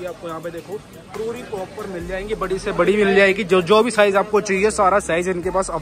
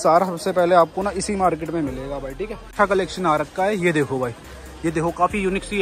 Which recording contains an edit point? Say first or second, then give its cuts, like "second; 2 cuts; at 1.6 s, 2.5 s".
second; 1 cut; at 2.7 s